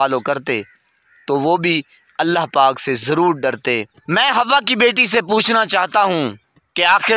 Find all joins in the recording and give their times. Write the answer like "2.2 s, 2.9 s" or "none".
4.0 s